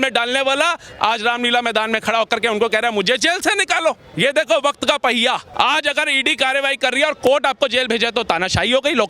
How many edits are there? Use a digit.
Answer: 2